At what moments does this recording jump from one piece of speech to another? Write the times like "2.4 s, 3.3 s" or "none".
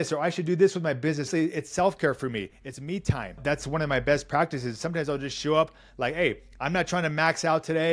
1.3 s, 3.4 s